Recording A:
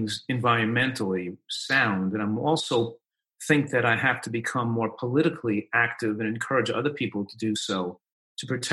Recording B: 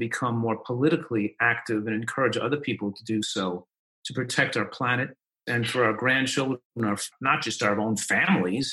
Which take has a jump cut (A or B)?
B